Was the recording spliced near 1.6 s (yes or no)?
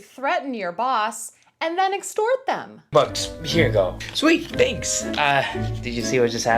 no